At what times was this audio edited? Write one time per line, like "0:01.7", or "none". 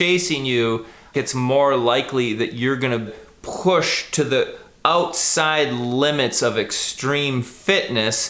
0:01.1
0:03.3